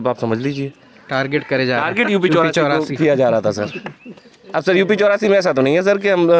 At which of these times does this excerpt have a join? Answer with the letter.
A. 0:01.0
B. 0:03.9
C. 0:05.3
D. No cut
D